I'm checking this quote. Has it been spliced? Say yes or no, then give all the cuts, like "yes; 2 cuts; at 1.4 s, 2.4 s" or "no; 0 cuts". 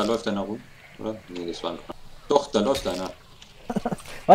yes; 1 cut; at 1.8 s